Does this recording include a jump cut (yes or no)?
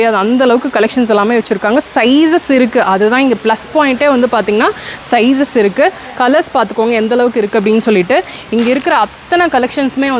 no